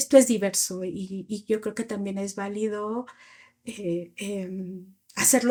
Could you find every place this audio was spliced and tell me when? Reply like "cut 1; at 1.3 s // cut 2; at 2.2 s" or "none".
none